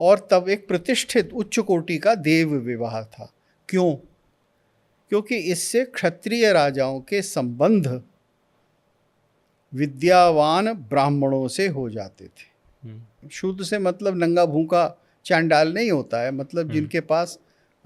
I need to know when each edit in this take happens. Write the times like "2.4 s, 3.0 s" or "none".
13.3 s